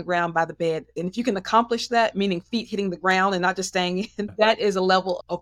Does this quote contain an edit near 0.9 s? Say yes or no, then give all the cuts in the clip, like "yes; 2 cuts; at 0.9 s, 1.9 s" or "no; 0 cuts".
yes; 2 cuts; at 0.9 s, 4.3 s